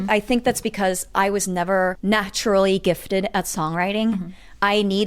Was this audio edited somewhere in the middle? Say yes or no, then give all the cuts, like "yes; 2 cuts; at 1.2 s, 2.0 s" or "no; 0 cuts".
yes; 1 cut; at 2.0 s